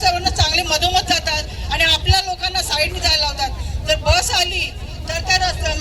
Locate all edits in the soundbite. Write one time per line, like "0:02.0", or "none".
none